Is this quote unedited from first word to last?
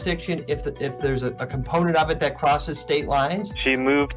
yes; 0 cuts

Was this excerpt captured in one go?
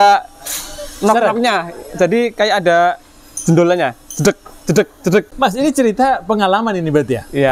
no; 1 cut; at 5.3 s

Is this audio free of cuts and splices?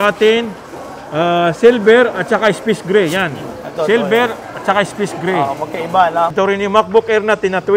no; 1 cut; at 6.3 s

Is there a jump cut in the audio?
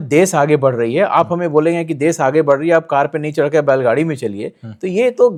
no; 0 cuts

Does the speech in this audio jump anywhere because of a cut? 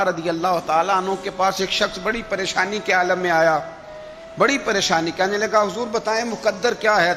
no; 0 cuts

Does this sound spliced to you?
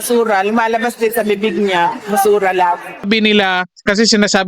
yes; 1 cut; at 3.1 s

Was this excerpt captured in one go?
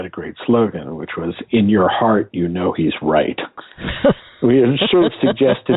yes; 0 cuts

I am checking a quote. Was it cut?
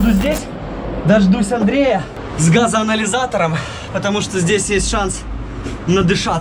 yes; 1 cut; at 2.2 s

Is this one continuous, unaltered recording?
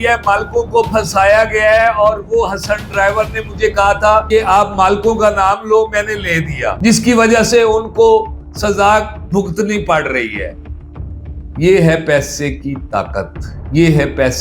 yes; 0 cuts

